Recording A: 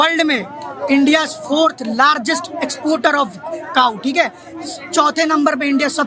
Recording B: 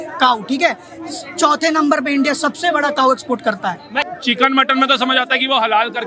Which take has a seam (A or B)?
B